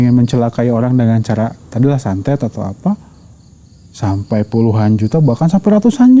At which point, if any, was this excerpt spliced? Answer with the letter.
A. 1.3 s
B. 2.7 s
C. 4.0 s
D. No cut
D